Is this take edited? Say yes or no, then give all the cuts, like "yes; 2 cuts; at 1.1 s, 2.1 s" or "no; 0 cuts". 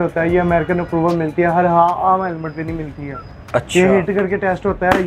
no; 0 cuts